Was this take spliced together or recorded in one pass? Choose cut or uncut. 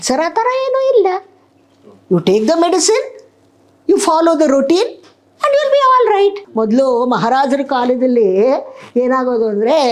cut